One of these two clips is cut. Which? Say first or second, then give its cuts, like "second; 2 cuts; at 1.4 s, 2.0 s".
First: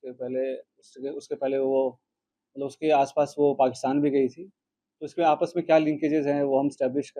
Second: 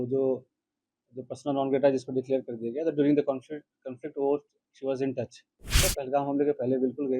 second; 1 cut; at 5.8 s